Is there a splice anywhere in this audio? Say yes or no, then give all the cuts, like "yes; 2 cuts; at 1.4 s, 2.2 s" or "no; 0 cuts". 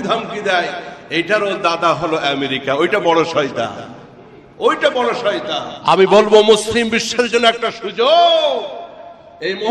yes; 1 cut; at 5.7 s